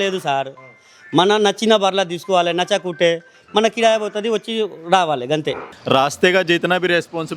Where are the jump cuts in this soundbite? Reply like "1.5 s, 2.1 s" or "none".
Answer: 5.7 s